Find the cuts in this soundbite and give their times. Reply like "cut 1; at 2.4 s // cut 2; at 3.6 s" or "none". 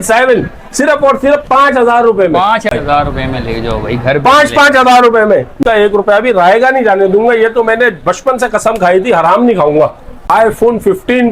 cut 1; at 2.7 s // cut 2; at 5.6 s // cut 3; at 10.1 s

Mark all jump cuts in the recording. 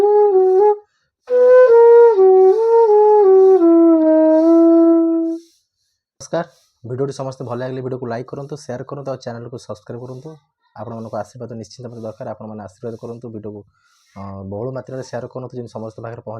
cut 1; at 6.2 s

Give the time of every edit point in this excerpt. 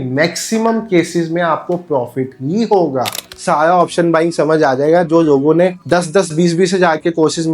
cut 1; at 3.3 s

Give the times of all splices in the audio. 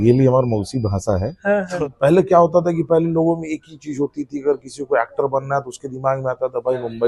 cut 1; at 1.7 s

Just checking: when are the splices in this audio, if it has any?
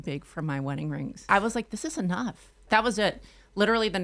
cut 1; at 1.3 s // cut 2; at 2.7 s

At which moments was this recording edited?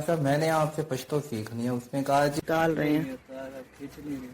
cut 1; at 2.3 s

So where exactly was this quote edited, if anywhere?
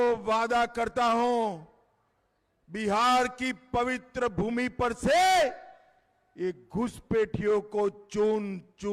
none

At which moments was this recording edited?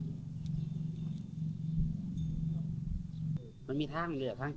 cut 1; at 3.4 s

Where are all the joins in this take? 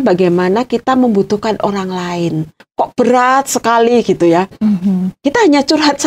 cut 1; at 2.5 s

